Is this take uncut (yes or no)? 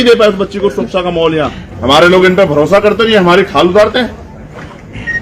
no